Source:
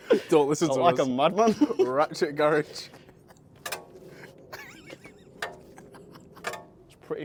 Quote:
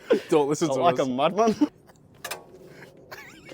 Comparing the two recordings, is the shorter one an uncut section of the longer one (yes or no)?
no